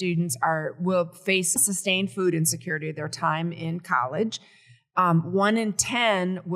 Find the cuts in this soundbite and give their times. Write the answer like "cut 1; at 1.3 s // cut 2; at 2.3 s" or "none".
cut 1; at 1.6 s